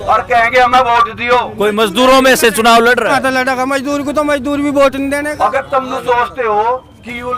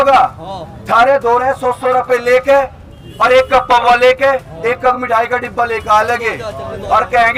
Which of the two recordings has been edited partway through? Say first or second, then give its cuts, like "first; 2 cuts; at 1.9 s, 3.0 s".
first; 3 cuts; at 1.5 s, 3.2 s, 5.3 s